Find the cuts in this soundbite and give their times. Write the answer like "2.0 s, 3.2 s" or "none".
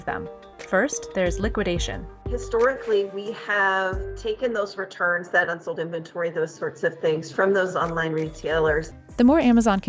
8.9 s